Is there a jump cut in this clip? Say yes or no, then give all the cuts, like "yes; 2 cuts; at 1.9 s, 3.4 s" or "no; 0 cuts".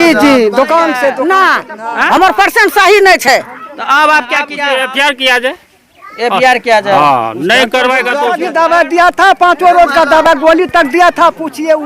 yes; 3 cuts; at 1.2 s, 4.5 s, 8.4 s